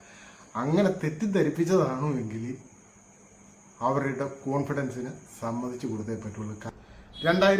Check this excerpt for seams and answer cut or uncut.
cut